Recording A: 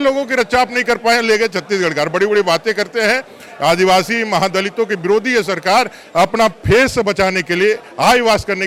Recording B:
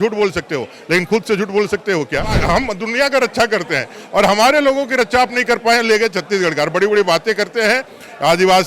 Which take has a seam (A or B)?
B